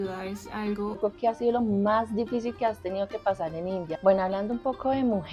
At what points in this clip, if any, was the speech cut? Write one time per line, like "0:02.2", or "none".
0:01.0
0:03.9